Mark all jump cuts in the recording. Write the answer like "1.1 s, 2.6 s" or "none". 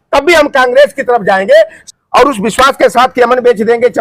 1.8 s